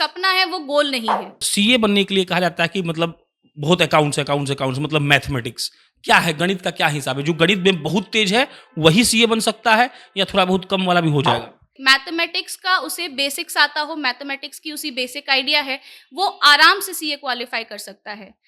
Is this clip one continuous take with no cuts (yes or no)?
no